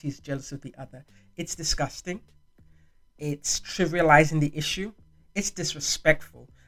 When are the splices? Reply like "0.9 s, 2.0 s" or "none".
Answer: none